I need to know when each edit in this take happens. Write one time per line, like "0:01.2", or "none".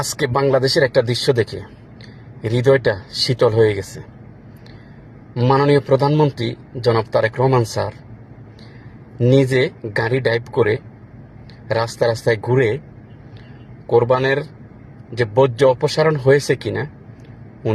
none